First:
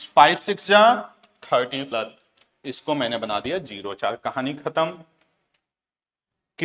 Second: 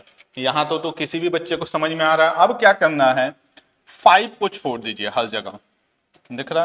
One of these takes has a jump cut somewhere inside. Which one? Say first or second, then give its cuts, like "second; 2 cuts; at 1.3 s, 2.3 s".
first; 1 cut; at 2.0 s